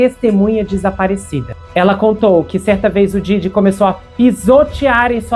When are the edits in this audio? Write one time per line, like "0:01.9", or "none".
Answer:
0:01.5